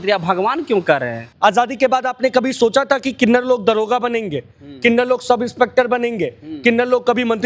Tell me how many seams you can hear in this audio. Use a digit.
1